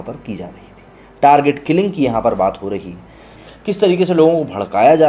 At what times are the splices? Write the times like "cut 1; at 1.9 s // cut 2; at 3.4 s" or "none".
cut 1; at 3.3 s